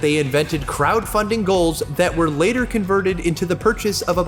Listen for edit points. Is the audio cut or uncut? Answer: uncut